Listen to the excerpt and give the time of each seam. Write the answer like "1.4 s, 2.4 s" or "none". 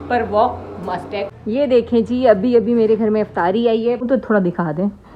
1.3 s, 4.1 s